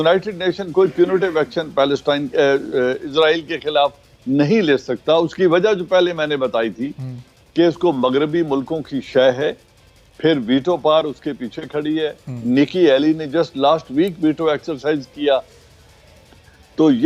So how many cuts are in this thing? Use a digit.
0